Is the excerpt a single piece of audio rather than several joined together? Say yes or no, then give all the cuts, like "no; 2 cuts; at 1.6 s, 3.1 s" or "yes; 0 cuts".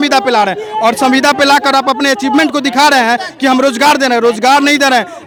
yes; 0 cuts